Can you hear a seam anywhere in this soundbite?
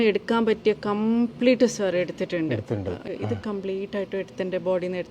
yes; 1 cut; at 3.0 s

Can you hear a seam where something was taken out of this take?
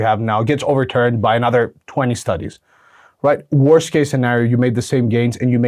no; 0 cuts

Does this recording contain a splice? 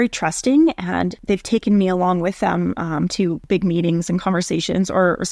no; 0 cuts

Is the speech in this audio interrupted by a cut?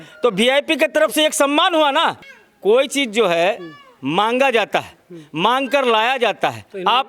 yes; 1 cut; at 2.3 s

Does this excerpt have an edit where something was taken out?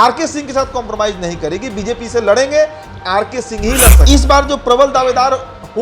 yes; 1 cut; at 4.0 s

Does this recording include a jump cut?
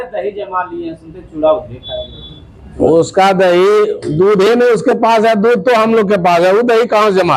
no; 0 cuts

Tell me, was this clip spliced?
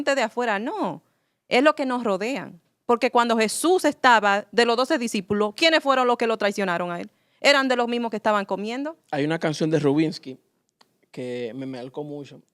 yes; 1 cut; at 9.0 s

